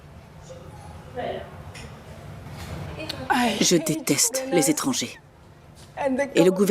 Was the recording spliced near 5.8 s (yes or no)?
no